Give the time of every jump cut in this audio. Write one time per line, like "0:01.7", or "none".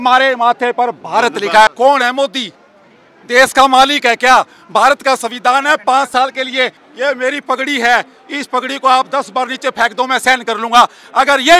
0:01.7
0:06.8